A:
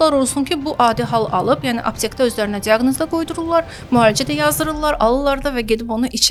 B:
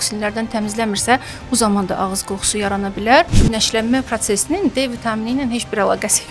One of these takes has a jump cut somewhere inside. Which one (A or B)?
B